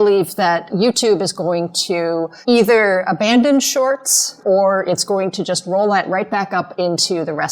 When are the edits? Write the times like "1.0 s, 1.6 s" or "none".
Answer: 2.3 s, 4.4 s